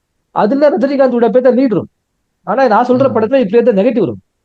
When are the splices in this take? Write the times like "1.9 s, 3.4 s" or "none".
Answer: none